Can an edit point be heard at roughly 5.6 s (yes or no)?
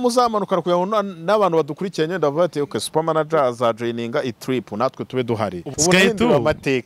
yes